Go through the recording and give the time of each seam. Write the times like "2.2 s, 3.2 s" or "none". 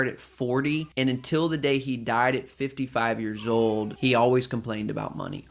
0.9 s, 3.9 s